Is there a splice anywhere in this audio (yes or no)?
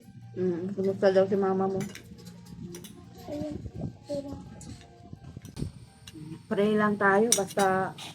yes